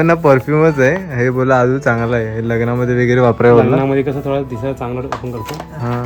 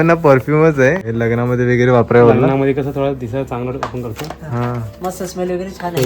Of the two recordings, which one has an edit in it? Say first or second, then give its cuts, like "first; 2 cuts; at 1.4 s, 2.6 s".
second; 1 cut; at 1.1 s